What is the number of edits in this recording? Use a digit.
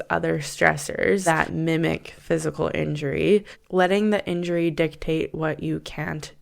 2